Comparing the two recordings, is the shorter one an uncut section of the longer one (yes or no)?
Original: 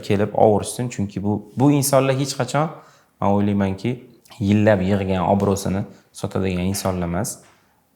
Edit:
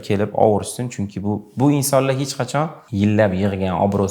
no